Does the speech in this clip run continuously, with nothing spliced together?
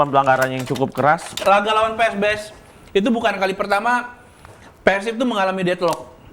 no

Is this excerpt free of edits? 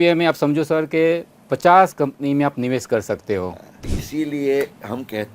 no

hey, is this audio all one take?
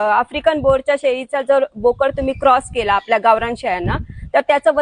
yes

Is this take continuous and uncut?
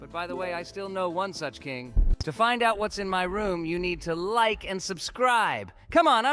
no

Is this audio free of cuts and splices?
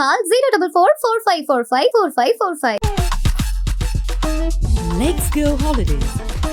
yes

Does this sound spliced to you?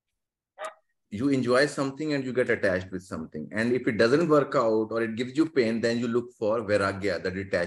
yes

